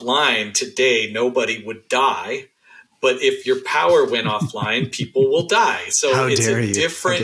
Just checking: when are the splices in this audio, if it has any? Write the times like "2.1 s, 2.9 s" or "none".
none